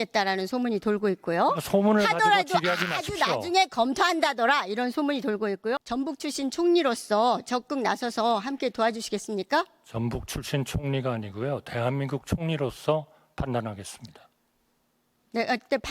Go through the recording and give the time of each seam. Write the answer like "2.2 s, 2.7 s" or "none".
5.8 s